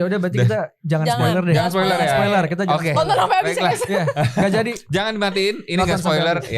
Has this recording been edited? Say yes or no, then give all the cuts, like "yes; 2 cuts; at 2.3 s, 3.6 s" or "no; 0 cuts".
no; 0 cuts